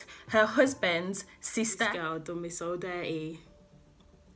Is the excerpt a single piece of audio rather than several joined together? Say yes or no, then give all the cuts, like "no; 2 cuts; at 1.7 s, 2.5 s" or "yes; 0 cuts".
no; 1 cut; at 1.9 s